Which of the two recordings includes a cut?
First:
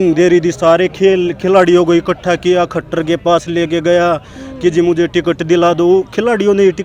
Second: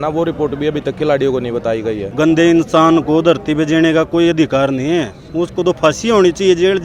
second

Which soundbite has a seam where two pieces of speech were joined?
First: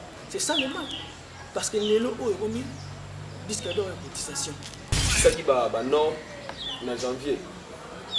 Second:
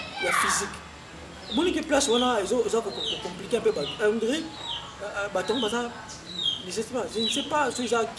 first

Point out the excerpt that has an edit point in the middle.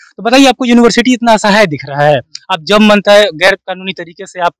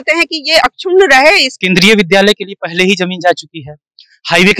second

